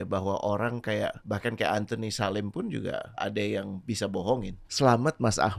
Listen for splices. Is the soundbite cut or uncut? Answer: cut